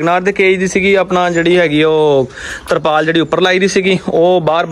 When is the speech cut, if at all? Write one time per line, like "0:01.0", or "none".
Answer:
none

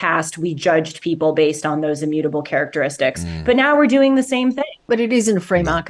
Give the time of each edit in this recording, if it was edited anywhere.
0:04.8

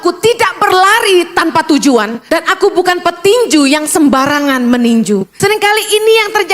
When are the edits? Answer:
0:02.2
0:05.3

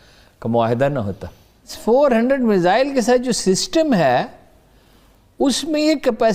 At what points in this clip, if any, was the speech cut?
0:01.8

